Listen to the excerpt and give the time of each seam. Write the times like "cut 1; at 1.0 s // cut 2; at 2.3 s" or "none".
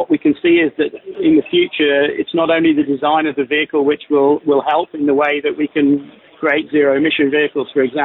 cut 1; at 1.0 s